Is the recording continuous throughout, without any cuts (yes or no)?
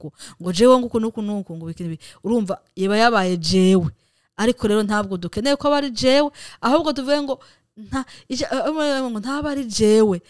yes